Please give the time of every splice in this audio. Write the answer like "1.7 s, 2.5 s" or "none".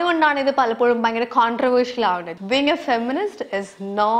2.3 s